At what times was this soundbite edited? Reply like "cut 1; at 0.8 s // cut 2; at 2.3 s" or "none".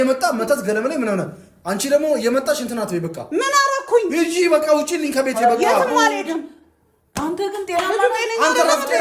none